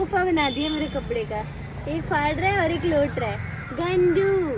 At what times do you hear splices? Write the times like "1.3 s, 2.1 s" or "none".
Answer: none